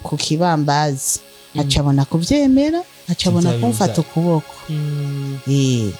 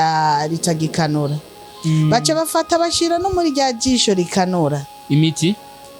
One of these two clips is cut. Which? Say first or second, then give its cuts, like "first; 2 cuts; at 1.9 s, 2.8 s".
first; 1 cut; at 2.9 s